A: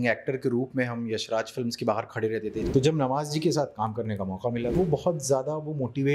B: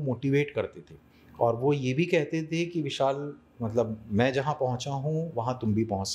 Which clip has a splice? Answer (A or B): A